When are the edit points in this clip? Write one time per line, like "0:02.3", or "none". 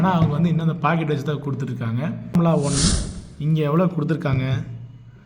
0:02.4